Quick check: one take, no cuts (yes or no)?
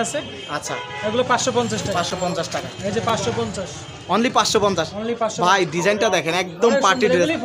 yes